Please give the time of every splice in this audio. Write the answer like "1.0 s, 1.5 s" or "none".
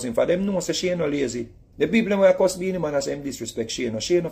1.6 s